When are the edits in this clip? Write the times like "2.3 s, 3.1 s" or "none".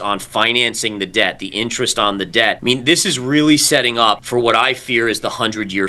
2.6 s, 4.2 s

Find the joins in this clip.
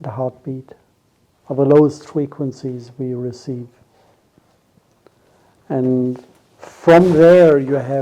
none

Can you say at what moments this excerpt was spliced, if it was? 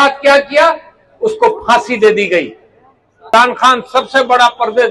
3.3 s

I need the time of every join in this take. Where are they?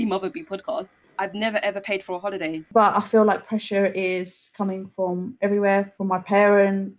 1.0 s, 2.7 s, 5.9 s

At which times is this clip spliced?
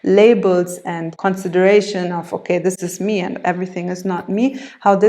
1.1 s, 2.8 s

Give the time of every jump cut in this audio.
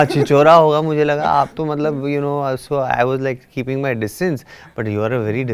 none

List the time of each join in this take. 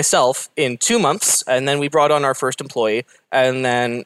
none

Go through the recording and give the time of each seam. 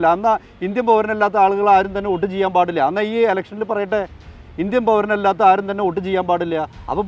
none

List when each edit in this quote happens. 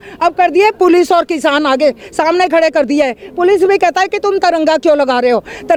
none

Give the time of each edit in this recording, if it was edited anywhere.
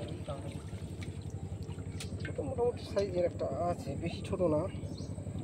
none

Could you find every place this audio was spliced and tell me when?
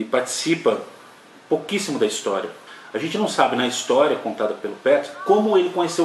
none

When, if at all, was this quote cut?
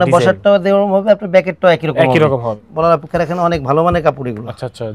2.6 s

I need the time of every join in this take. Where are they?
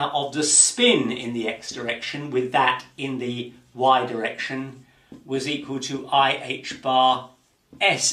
2.9 s

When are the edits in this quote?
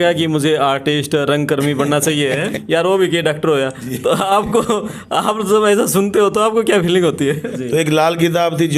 2.6 s, 7.5 s

